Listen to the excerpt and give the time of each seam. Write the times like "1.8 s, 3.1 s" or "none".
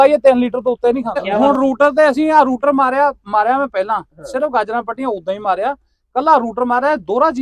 1.3 s